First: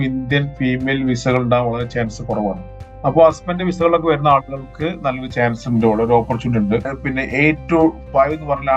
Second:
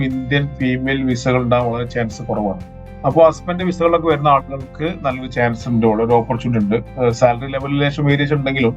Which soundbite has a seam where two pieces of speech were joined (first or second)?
first